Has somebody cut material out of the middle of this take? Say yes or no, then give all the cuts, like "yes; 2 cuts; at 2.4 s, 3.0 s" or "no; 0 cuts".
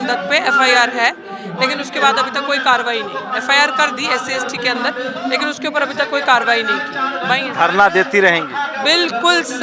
no; 0 cuts